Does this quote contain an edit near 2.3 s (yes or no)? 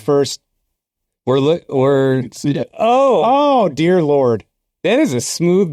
no